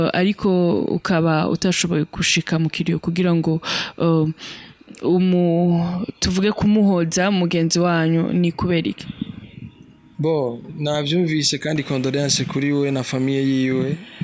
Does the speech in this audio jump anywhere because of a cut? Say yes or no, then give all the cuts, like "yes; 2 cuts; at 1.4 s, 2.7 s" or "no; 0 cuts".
no; 0 cuts